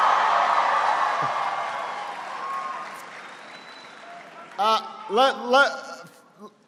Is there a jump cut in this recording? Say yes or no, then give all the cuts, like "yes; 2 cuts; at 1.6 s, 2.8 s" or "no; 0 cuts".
no; 0 cuts